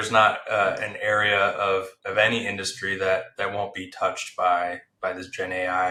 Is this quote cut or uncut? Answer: uncut